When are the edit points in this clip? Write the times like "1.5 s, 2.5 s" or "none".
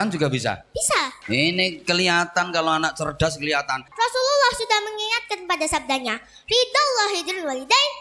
1.2 s, 3.9 s